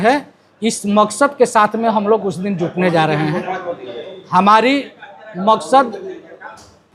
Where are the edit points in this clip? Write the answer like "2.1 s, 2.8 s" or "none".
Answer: none